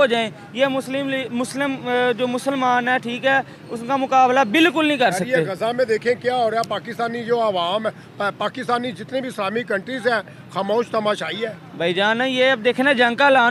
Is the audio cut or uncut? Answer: uncut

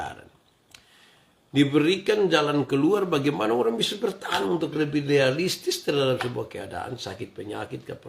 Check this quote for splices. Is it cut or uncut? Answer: cut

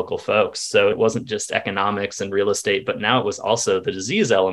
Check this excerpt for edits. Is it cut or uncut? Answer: cut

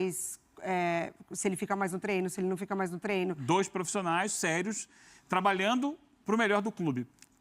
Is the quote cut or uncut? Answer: cut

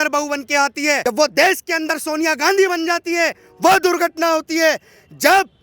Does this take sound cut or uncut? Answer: cut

